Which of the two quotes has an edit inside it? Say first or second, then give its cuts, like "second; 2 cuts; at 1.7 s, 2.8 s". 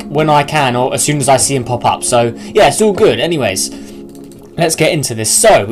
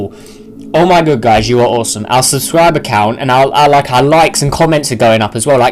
second; 1 cut; at 3.9 s